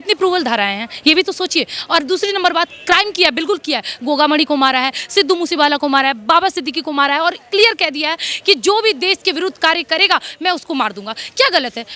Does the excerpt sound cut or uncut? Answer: uncut